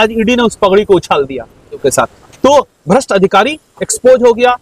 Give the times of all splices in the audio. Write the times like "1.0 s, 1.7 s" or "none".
1.8 s